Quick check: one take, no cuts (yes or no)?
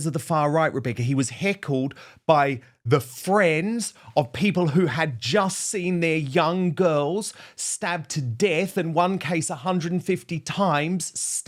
yes